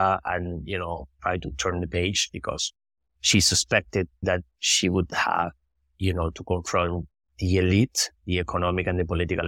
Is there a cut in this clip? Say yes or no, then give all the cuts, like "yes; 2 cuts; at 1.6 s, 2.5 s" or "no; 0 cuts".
yes; 2 cuts; at 1.1 s, 4.2 s